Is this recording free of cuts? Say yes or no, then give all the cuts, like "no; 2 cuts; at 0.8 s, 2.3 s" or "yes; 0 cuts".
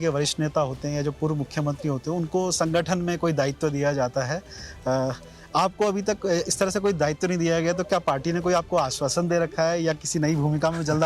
yes; 0 cuts